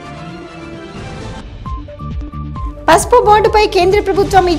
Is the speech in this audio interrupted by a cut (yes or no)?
yes